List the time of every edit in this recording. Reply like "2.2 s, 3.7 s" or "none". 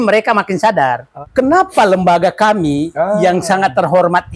1.1 s